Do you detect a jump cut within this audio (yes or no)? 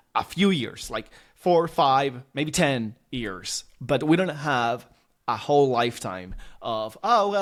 no